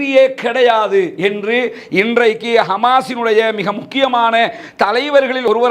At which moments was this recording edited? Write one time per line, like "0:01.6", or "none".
none